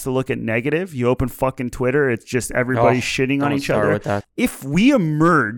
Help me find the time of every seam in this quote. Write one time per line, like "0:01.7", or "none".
0:04.2